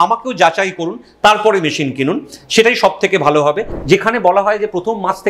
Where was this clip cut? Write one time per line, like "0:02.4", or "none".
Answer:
0:03.7